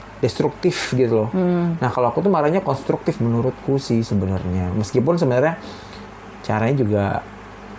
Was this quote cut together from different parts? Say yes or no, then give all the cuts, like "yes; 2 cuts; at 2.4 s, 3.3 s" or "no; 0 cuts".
no; 0 cuts